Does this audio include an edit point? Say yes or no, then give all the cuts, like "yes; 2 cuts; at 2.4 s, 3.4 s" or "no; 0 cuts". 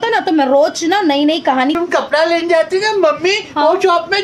yes; 1 cut; at 1.8 s